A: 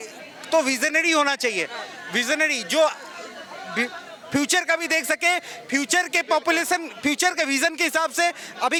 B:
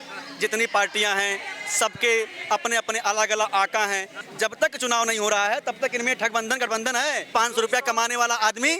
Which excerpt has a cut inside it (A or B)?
B